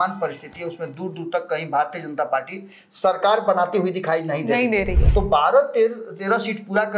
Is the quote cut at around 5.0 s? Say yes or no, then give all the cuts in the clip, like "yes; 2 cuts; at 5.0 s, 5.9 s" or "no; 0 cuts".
yes; 1 cut; at 5.0 s